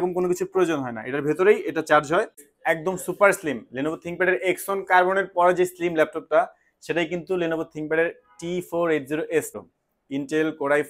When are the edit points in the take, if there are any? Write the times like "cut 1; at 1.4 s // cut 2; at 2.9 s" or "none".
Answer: cut 1; at 2.5 s // cut 2; at 9.6 s

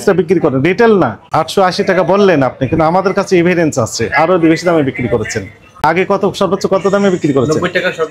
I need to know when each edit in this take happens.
cut 1; at 1.2 s // cut 2; at 5.8 s

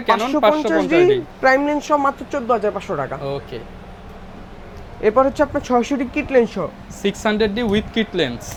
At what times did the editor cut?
none

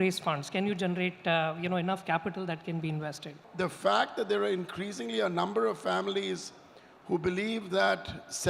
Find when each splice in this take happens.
cut 1; at 3.4 s

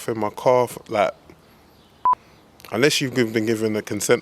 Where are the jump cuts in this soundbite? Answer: cut 1; at 2.1 s

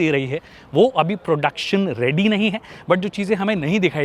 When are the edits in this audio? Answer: none

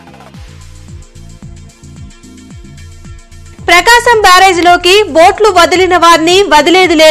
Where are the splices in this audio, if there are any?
cut 1; at 1.9 s // cut 2; at 2.6 s

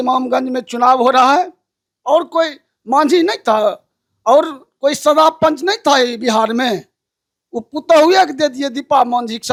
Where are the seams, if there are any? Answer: none

